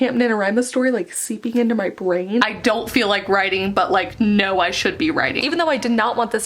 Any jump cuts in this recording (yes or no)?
yes